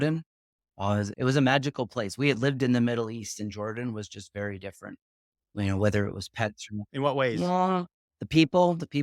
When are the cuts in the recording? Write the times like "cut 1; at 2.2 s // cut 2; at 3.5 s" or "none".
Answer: cut 1; at 1.1 s